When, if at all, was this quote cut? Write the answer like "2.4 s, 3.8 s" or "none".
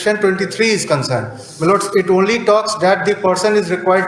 none